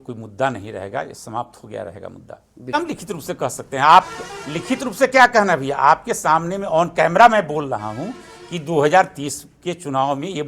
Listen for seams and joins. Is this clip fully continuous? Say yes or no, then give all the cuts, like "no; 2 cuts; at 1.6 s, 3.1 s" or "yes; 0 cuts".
no; 1 cut; at 2.7 s